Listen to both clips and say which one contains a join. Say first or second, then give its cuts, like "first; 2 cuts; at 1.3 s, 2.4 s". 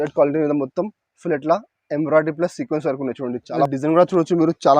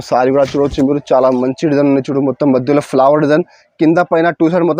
first; 1 cut; at 3.7 s